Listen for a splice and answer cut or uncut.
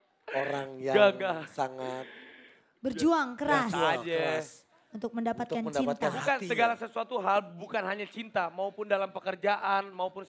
uncut